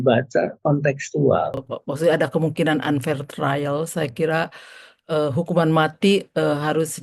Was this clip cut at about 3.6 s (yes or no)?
no